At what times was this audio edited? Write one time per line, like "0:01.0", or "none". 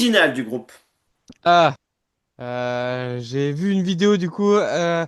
none

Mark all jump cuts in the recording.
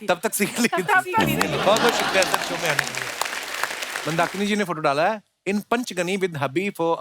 0:03.9

